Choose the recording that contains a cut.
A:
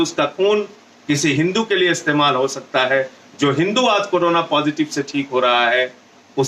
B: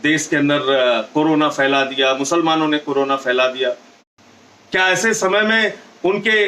B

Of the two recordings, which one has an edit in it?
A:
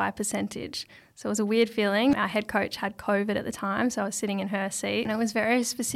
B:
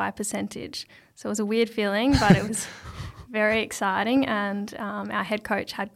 A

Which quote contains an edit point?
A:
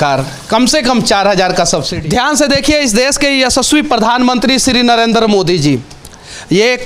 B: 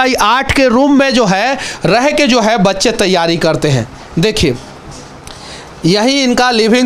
A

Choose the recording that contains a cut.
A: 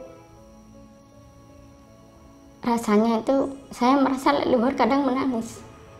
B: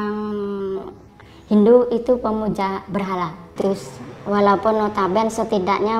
B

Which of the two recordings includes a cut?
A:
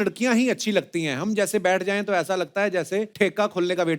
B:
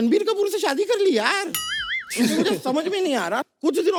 A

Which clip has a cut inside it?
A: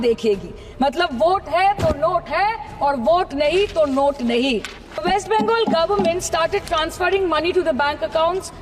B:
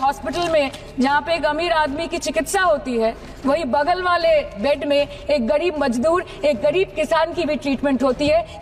A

